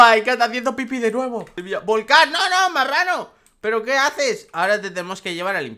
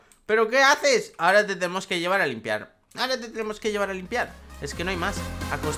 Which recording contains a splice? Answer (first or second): first